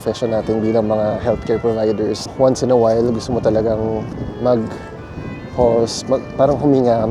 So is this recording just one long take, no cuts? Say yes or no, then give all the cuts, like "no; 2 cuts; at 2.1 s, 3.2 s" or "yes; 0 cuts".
no; 2 cuts; at 2.3 s, 4.2 s